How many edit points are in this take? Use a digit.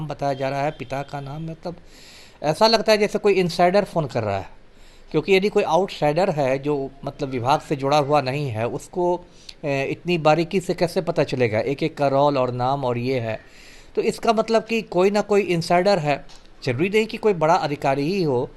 0